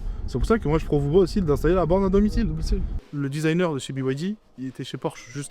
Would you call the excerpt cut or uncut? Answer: cut